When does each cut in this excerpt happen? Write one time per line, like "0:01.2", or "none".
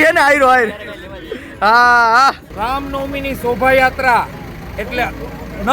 0:02.4